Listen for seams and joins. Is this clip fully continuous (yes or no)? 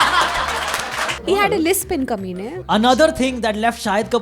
no